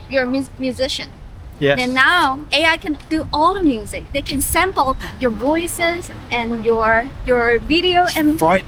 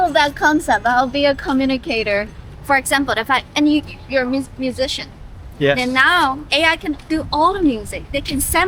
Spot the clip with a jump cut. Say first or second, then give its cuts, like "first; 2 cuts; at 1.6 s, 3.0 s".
second; 1 cut; at 2.4 s